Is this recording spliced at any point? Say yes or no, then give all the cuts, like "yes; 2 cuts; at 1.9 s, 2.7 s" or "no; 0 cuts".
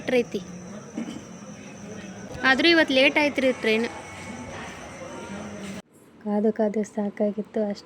yes; 2 cuts; at 2.3 s, 5.9 s